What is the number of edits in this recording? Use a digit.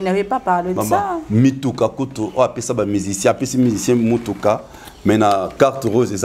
0